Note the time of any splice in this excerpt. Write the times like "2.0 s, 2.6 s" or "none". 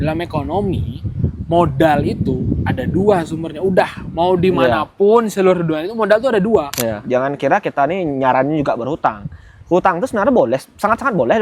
7.0 s